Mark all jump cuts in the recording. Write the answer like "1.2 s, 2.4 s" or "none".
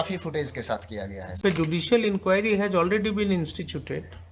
1.4 s